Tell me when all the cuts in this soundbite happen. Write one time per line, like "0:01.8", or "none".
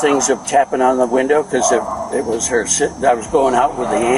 none